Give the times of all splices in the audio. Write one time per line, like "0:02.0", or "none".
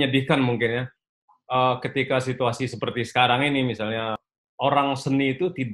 0:04.3